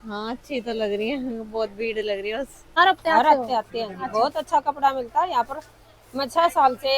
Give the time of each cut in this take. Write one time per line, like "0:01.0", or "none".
0:02.6